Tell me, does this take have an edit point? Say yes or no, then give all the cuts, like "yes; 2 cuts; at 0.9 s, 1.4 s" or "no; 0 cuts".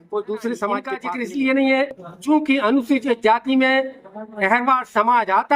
yes; 1 cut; at 1.0 s